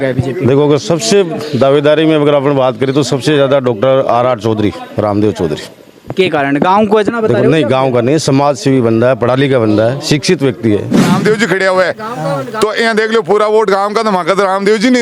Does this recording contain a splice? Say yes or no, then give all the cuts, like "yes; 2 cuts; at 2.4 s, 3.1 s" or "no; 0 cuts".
yes; 1 cut; at 11.1 s